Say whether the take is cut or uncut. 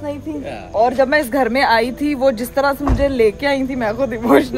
uncut